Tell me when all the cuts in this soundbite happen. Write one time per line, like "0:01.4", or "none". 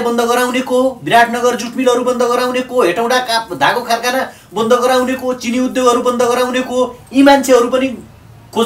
none